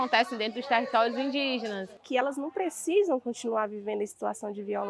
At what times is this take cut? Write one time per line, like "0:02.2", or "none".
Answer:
0:02.0